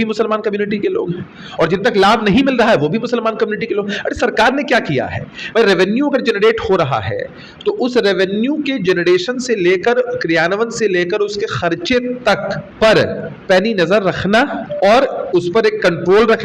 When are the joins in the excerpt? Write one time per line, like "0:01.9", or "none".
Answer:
0:12.7
0:13.3
0:14.6